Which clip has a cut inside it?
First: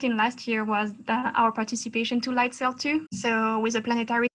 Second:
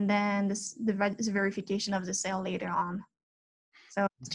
first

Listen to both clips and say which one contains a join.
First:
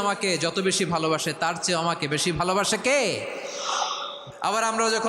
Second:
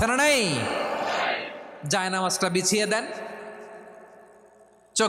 first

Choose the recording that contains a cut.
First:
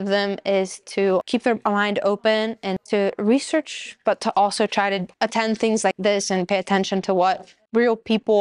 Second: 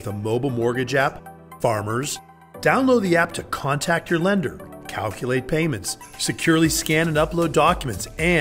first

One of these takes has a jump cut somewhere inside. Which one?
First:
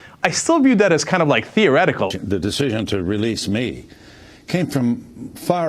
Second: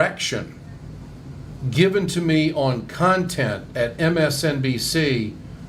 first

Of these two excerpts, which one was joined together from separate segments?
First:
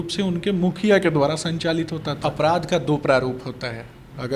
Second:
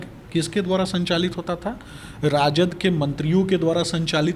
first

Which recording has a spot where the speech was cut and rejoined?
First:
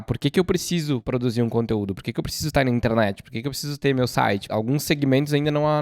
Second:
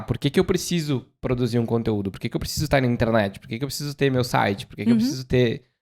first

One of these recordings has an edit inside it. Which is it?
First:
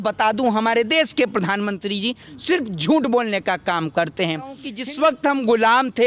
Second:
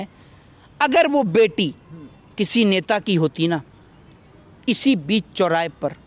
first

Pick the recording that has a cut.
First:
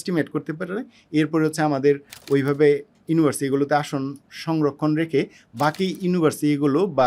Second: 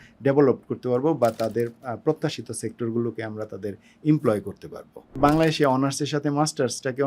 second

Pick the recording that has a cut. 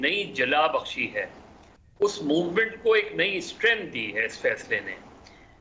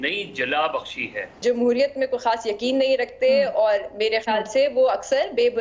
second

